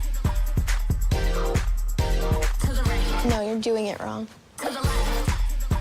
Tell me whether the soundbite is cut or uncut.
cut